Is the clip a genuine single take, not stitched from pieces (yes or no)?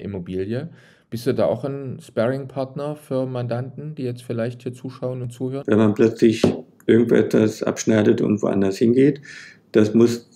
no